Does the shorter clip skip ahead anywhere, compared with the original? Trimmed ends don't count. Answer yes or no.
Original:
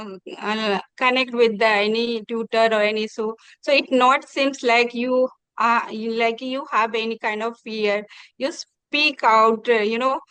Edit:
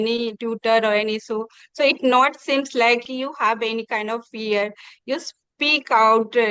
yes